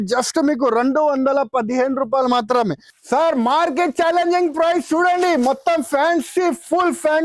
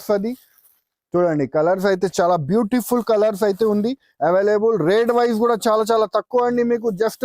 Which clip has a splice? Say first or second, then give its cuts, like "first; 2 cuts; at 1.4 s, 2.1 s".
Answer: first; 1 cut; at 2.9 s